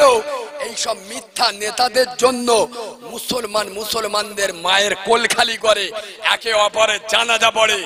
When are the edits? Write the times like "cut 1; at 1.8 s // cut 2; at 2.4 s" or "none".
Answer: none